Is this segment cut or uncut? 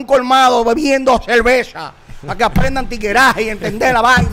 uncut